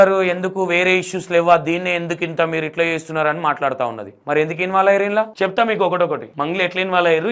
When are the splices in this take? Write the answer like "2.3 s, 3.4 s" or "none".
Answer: 4.1 s, 5.3 s, 6.3 s